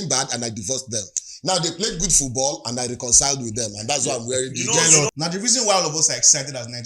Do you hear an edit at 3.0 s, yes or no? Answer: no